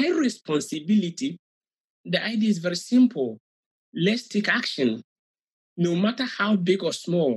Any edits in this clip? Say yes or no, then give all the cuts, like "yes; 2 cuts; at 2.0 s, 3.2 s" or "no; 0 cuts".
yes; 1 cut; at 1.9 s